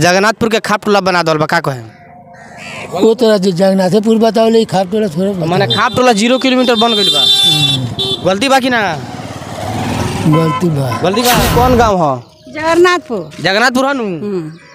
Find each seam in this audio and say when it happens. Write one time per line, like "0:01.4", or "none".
0:11.4